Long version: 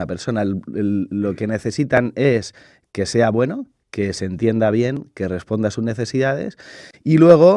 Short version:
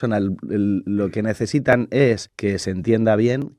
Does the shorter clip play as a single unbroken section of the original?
no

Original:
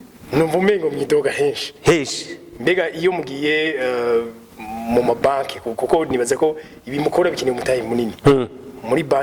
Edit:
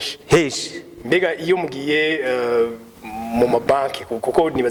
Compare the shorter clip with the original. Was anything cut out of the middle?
no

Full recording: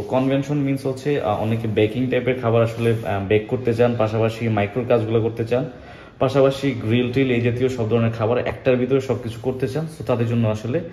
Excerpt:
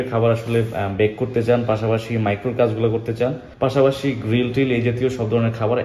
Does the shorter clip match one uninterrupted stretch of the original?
no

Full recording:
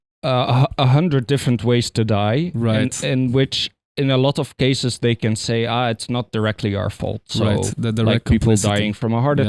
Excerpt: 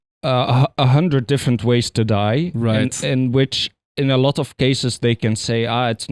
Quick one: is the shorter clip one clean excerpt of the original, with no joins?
yes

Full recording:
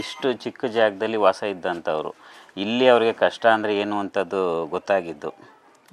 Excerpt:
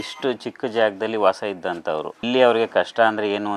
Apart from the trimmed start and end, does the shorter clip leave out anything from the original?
yes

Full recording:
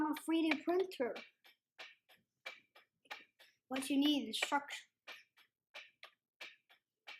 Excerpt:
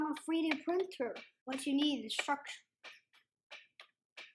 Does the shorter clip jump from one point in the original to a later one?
yes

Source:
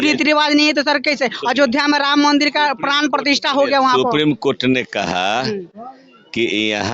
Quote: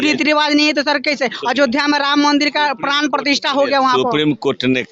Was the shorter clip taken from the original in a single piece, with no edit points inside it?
yes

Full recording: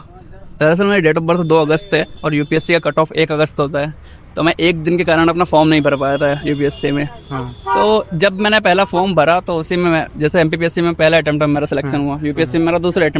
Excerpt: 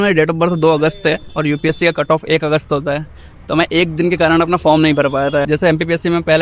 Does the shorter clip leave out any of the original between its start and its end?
yes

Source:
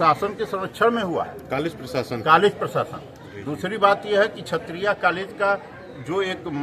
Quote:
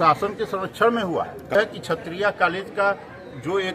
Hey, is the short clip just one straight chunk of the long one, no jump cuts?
no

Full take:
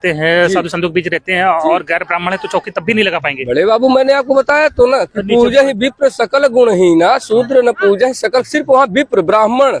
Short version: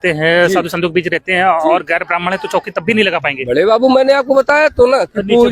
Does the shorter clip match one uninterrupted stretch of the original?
yes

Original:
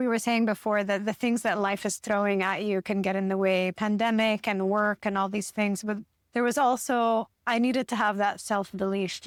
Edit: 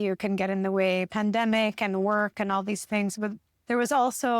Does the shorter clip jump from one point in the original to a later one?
no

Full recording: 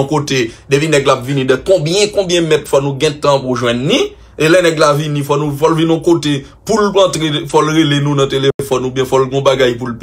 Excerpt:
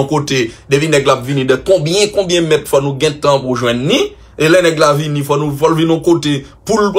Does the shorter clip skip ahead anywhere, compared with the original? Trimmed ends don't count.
no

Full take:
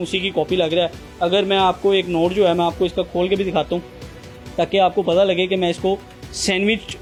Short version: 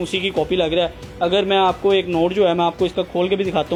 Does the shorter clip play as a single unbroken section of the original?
yes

